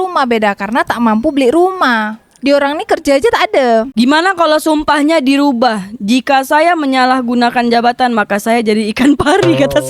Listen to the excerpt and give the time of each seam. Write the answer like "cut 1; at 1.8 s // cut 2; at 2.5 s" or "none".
cut 1; at 3.9 s